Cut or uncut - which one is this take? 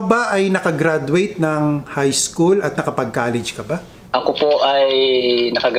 uncut